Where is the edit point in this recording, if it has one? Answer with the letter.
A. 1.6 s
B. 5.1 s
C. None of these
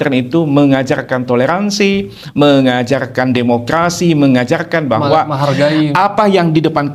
C